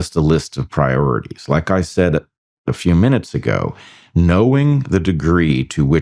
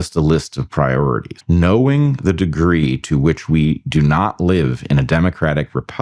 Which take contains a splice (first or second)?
second